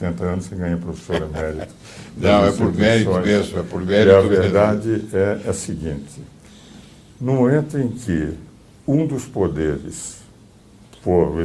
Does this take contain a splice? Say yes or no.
yes